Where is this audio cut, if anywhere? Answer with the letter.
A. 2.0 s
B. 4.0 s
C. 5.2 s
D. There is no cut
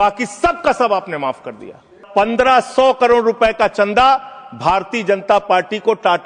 A